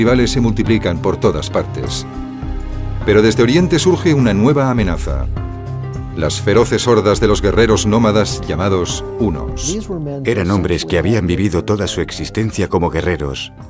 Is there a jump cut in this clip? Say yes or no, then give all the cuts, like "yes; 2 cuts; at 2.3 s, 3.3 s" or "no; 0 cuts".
no; 0 cuts